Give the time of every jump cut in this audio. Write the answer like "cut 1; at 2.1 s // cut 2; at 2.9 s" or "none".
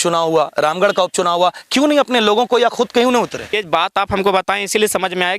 cut 1; at 3.5 s